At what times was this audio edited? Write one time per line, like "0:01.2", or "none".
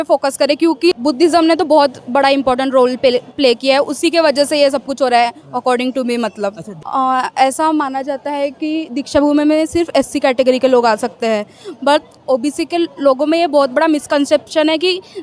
0:00.9
0:06.7
0:12.2